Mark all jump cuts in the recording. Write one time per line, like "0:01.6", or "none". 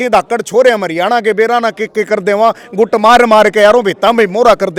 none